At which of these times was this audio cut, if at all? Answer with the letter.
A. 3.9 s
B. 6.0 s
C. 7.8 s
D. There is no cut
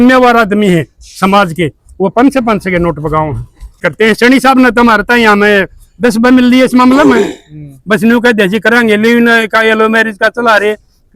A